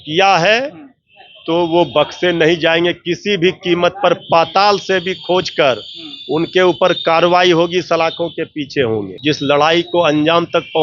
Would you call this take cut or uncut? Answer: cut